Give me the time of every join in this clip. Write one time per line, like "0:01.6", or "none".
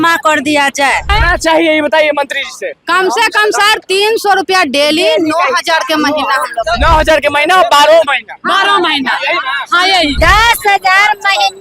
0:01.1
0:10.2